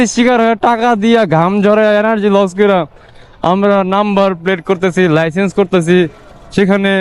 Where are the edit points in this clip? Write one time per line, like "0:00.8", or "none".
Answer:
none